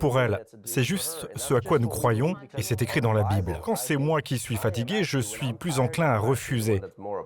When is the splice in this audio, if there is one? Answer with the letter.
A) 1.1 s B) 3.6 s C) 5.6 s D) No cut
B